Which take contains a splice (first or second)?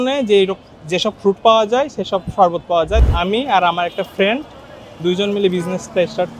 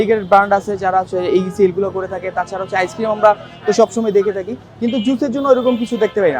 first